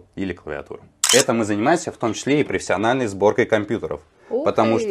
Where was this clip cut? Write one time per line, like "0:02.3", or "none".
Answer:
0:01.0